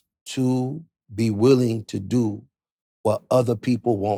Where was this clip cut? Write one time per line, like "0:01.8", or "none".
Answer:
none